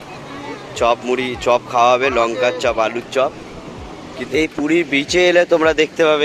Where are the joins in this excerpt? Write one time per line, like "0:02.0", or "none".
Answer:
0:04.2